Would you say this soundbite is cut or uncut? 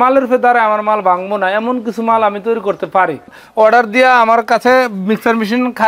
cut